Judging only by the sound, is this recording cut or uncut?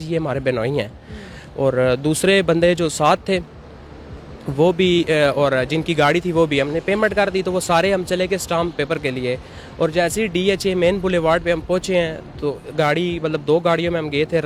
uncut